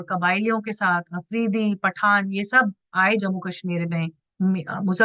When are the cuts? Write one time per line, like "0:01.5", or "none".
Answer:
none